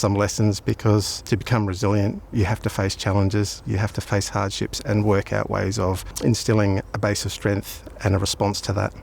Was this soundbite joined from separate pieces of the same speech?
yes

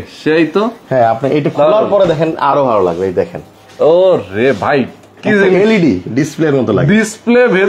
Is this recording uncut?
yes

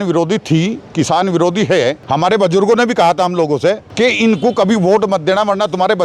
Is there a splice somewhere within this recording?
yes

